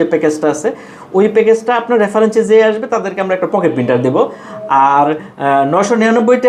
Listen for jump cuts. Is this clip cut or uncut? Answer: uncut